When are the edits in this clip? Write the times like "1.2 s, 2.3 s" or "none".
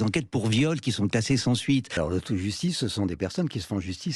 1.9 s